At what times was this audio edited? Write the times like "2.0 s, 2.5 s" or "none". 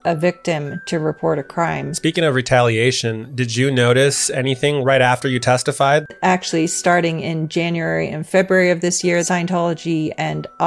1.9 s, 6.1 s, 9.2 s

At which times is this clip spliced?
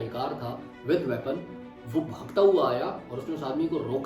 none

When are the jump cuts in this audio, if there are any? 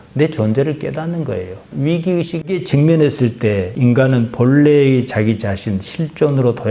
1.7 s, 2.6 s

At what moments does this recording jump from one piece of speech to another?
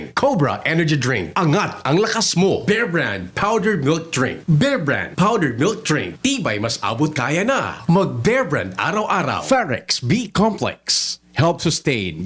none

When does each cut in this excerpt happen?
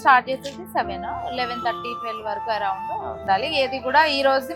3.2 s

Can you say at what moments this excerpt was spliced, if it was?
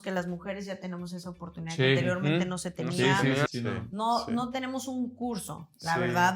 3.5 s

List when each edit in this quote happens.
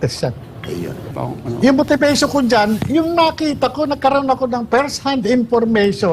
1.0 s

